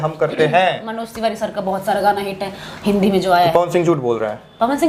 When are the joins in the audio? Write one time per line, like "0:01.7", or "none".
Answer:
none